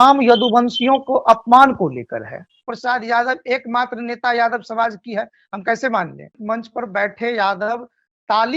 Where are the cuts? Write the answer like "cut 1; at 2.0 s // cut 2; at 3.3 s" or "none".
cut 1; at 2.7 s // cut 2; at 6.3 s

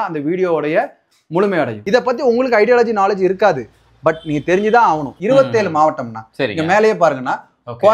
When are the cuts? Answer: cut 1; at 1.8 s // cut 2; at 5.1 s

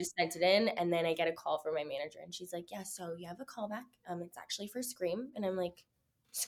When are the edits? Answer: none

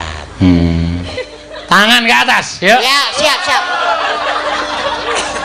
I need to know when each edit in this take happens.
cut 1; at 1.1 s

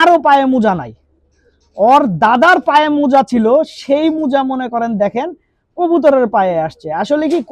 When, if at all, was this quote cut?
none

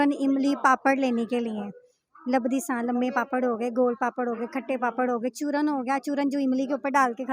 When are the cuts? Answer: none

